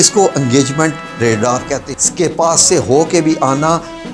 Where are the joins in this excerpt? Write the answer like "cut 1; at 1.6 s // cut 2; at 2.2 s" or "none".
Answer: cut 1; at 1.9 s